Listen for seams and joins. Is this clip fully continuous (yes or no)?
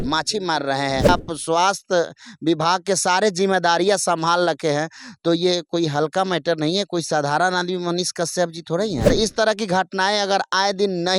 no